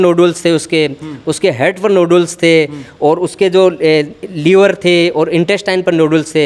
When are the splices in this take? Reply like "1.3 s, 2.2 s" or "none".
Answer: none